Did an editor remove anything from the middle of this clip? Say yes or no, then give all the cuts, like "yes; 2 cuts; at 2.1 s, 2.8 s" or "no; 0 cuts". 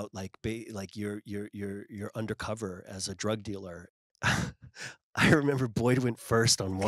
yes; 1 cut; at 3.9 s